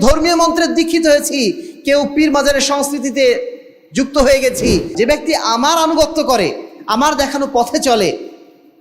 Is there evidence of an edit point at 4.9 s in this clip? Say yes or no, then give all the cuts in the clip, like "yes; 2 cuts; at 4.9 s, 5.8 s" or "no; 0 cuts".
yes; 1 cut; at 4.9 s